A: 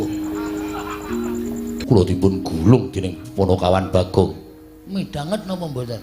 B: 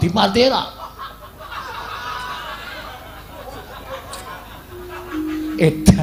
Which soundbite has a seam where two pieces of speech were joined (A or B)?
A